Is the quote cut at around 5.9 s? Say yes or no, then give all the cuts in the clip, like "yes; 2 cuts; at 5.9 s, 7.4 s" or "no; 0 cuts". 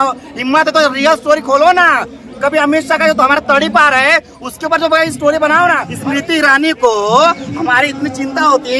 yes; 1 cut; at 5.9 s